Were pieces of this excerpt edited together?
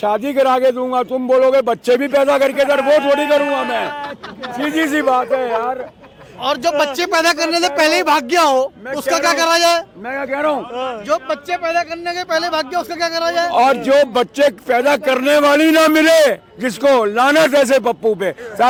no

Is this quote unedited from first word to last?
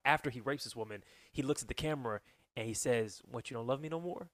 yes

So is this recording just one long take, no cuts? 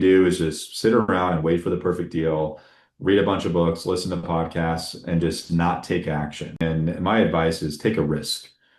no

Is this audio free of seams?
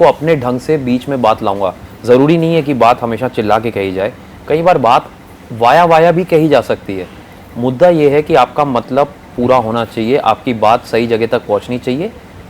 yes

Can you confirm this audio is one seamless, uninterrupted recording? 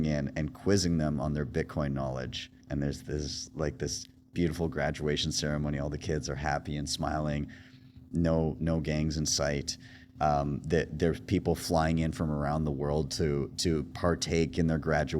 no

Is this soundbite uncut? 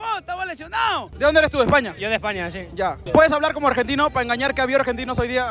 no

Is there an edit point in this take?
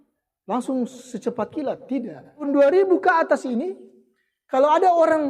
yes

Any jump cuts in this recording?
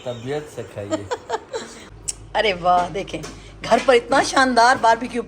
yes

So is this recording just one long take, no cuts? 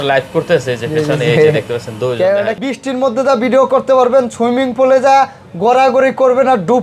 no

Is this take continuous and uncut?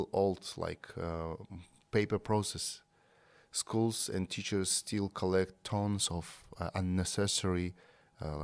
yes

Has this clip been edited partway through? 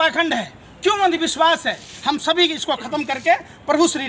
no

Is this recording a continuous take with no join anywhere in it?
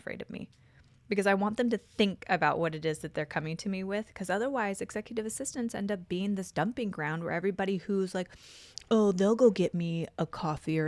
yes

